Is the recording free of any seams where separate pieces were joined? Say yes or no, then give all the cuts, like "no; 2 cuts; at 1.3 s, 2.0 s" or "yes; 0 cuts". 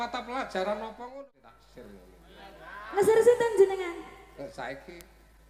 no; 1 cut; at 1.1 s